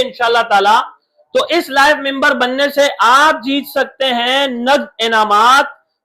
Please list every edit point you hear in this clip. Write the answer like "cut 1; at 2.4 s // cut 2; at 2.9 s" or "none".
none